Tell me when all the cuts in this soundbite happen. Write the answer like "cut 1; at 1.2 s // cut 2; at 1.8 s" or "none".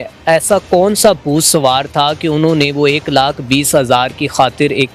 none

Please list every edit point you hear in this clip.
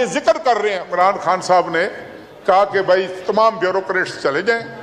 cut 1; at 0.9 s

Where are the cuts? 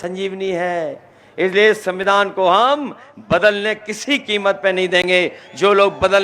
none

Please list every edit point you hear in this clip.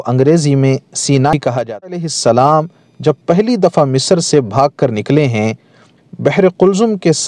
cut 1; at 1.9 s // cut 2; at 5.9 s

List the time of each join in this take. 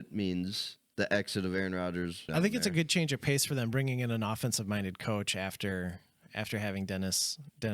cut 1; at 2.3 s

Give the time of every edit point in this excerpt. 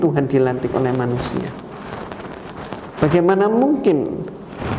none

